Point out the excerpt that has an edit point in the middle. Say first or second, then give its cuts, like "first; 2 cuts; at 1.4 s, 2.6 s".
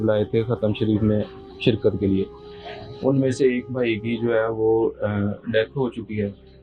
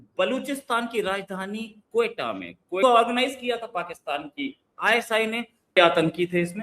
second; 2 cuts; at 2.8 s, 5.8 s